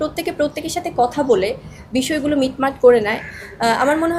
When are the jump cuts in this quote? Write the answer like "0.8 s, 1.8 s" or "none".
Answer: none

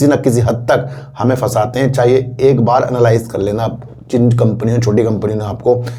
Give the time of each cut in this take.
none

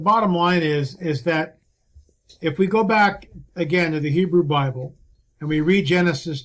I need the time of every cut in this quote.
none

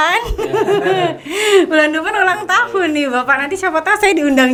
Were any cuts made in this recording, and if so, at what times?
none

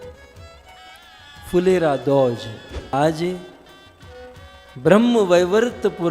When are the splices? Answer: 2.9 s

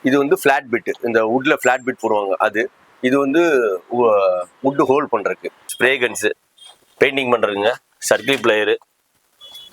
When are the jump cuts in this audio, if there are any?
5.7 s

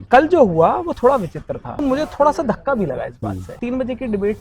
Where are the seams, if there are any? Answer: 1.8 s, 3.6 s

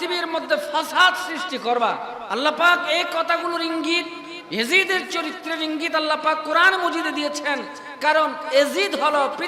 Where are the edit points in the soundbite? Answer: 2.2 s

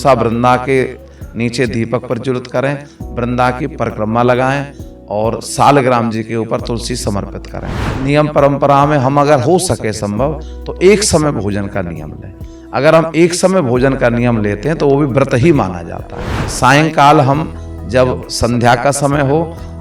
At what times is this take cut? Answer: 7.9 s, 16.5 s

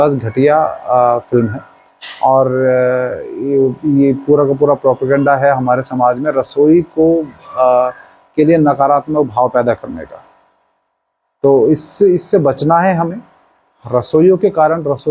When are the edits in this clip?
none

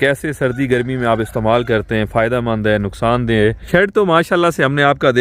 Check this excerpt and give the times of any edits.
3.6 s

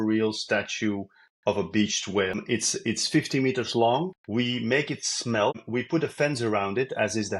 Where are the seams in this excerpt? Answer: 2.4 s, 4.2 s, 5.6 s

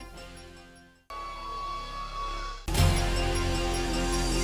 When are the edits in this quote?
2.7 s

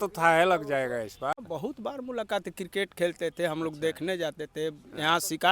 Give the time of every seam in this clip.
1.3 s

